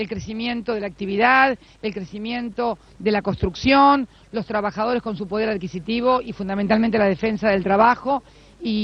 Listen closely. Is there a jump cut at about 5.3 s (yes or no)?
no